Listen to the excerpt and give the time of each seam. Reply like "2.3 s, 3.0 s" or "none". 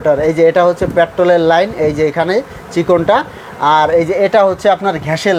none